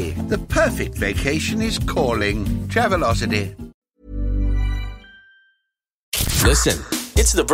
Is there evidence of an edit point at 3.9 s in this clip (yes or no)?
yes